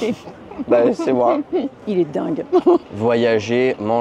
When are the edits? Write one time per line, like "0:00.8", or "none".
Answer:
0:01.7
0:02.9

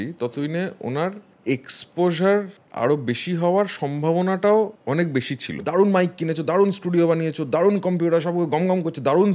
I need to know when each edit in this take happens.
0:01.3
0:02.6
0:05.1

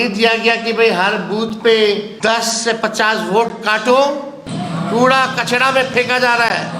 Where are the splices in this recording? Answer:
0:02.1
0:04.4

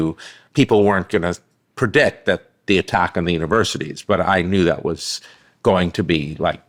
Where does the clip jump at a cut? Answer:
none

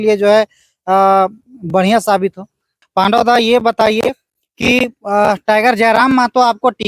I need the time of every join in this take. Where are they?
0:02.8

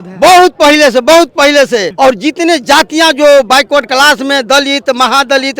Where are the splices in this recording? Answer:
0:01.9

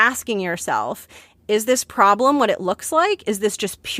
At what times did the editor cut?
none

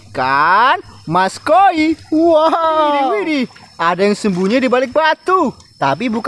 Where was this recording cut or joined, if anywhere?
0:03.3

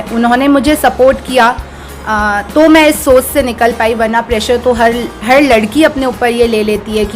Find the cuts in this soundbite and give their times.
none

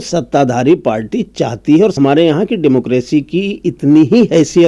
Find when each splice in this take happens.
0:01.9

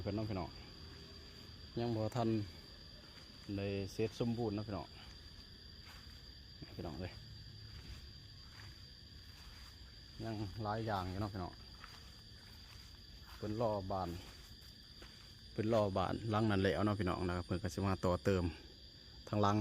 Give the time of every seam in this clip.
none

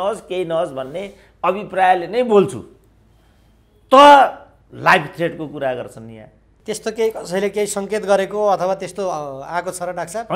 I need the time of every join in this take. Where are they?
0:06.5

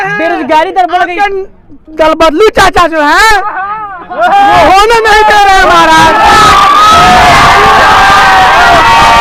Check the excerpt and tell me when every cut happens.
none

